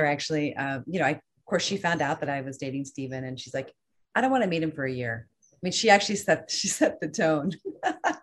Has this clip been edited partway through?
no; 0 cuts

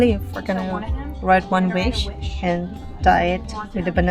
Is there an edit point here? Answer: no; 0 cuts

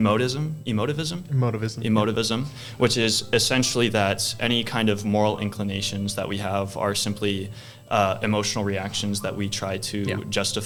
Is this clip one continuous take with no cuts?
yes; 0 cuts

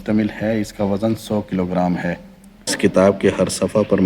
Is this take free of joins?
no; 1 cut; at 2.7 s

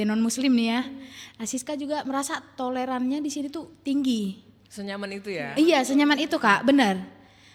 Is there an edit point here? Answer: no; 0 cuts

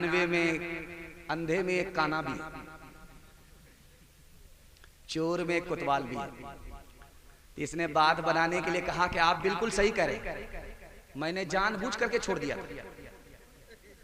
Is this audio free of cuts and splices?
yes; 0 cuts

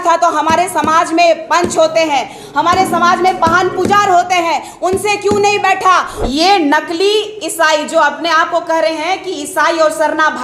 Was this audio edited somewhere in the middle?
yes; 1 cut; at 6.1 s

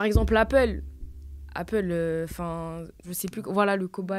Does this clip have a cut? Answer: yes; 1 cut; at 3.3 s

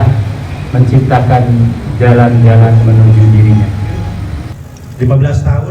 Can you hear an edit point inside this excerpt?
yes; 1 cut; at 4.5 s

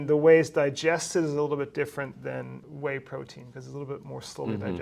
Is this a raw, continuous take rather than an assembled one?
no; 1 cut; at 2.6 s

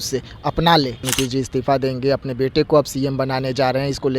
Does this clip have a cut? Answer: yes; 1 cut; at 1.1 s

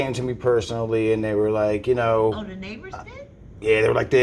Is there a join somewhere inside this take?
no; 0 cuts

